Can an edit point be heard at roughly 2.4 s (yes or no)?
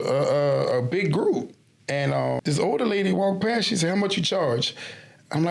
yes